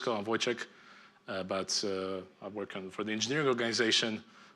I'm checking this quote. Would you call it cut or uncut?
cut